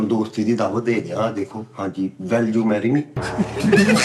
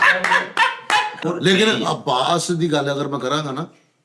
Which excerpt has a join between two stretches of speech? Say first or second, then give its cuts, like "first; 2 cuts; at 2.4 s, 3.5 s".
second; 1 cut; at 1.1 s